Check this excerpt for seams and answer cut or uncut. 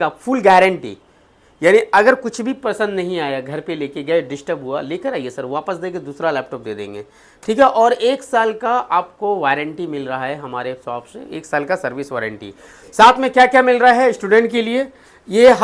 uncut